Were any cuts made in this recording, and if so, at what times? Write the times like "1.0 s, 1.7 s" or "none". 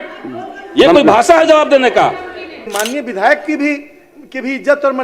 2.6 s